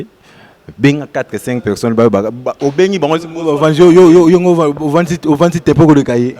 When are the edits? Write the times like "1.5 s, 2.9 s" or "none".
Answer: none